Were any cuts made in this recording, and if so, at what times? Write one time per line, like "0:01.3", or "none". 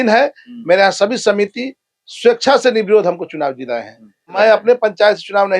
0:04.3

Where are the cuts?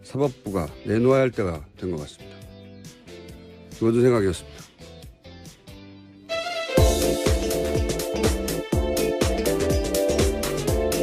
none

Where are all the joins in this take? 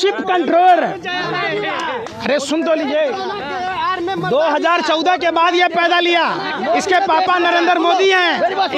none

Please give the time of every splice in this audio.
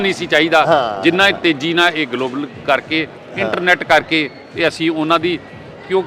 none

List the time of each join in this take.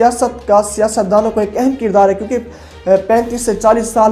none

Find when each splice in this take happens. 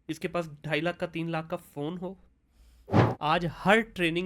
0:03.2

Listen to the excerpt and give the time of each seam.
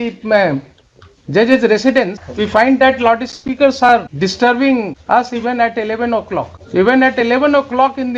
0:02.2
0:04.1
0:05.0
0:06.6

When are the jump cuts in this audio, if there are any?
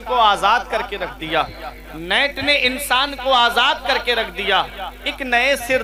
none

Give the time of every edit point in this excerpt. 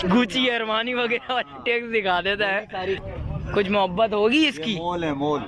0:03.0

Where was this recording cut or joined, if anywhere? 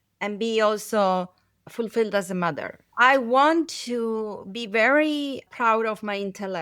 0:02.8

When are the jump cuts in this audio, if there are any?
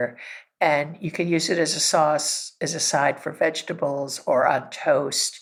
none

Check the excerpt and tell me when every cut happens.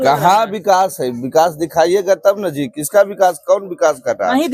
none

